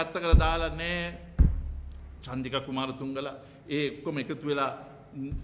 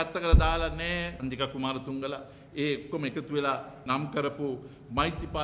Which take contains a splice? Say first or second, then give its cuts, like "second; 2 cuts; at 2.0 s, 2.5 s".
second; 2 cuts; at 1.1 s, 3.9 s